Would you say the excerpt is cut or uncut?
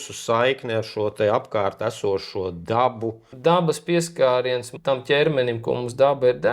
cut